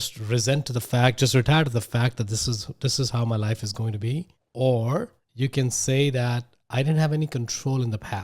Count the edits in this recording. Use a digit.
2